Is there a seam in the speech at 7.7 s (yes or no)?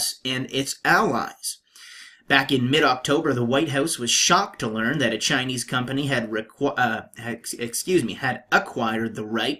no